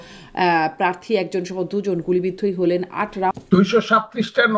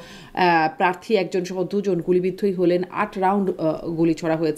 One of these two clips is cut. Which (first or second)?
first